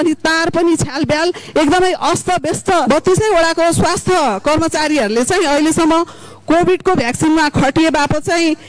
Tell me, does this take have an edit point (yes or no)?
yes